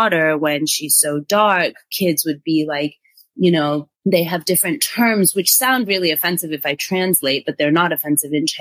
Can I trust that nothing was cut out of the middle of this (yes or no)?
yes